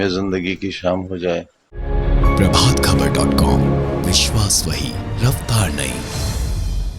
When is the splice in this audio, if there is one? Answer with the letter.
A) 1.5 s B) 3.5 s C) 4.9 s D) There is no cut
D